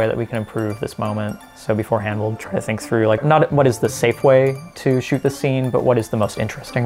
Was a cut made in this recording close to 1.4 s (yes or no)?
yes